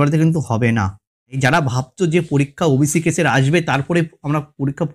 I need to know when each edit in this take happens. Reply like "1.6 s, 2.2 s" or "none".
1.4 s